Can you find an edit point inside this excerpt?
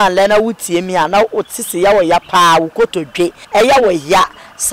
yes; 1 cut; at 3.4 s

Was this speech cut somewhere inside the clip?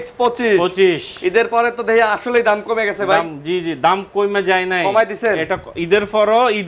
no; 0 cuts

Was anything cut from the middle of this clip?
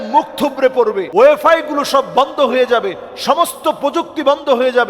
yes; 1 cut; at 1.0 s

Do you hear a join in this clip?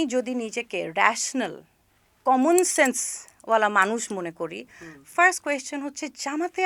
no; 0 cuts

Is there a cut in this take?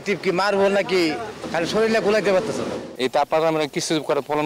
yes; 2 cuts; at 1.4 s, 2.9 s

